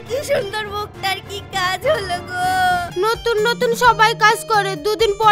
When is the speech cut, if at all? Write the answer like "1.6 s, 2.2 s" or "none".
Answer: 2.9 s